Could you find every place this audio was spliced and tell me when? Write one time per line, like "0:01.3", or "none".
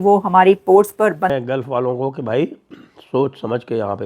0:01.3